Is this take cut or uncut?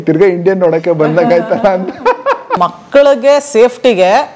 cut